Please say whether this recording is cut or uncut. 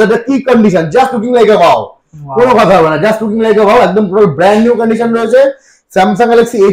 uncut